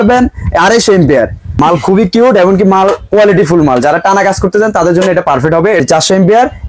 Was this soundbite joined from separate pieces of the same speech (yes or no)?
yes